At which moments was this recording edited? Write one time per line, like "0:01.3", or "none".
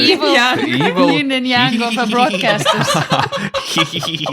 none